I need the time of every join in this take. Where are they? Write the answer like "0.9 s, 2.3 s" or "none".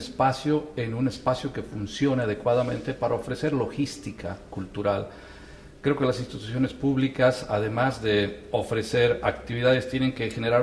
none

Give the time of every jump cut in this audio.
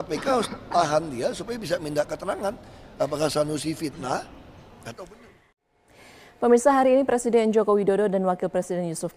7.7 s

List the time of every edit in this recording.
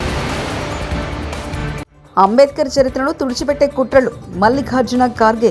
1.6 s

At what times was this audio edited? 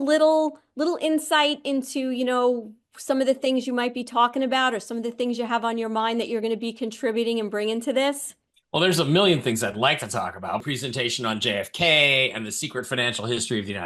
10.6 s

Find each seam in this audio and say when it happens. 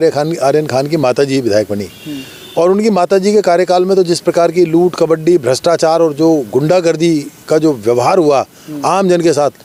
none

